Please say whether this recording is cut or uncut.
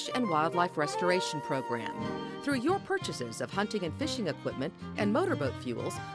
cut